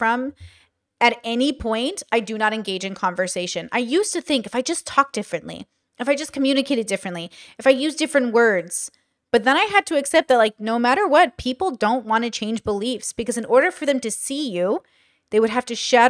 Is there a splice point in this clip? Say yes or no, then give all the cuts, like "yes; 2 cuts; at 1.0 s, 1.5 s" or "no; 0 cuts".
no; 0 cuts